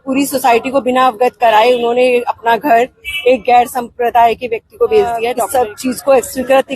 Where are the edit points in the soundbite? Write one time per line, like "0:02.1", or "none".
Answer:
0:05.4